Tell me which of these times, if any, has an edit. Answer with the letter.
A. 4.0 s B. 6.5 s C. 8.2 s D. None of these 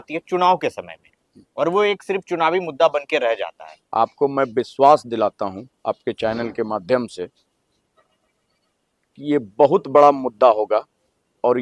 D